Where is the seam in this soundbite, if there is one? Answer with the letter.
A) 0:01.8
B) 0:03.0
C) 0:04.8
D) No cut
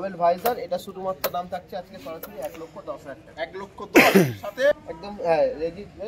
C